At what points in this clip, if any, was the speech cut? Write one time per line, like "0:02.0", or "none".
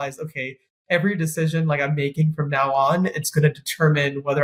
none

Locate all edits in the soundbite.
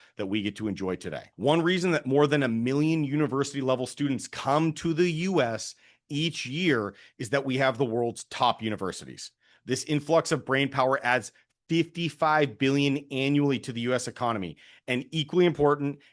0:01.3

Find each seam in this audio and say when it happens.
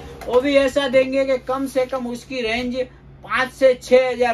none

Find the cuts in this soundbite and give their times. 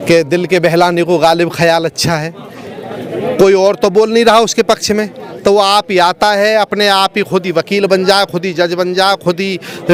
none

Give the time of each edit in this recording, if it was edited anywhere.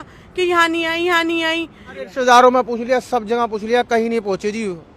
0:02.0

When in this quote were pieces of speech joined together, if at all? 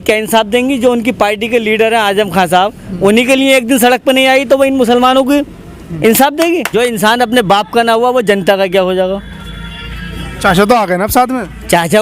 0:06.7

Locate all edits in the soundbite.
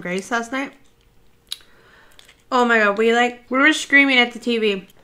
0:03.4

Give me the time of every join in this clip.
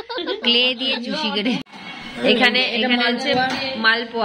0:01.6

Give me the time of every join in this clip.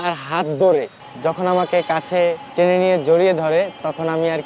0:01.0
0:02.4

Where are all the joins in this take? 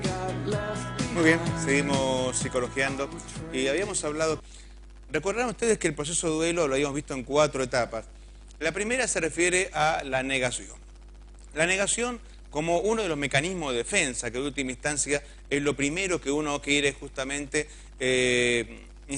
none

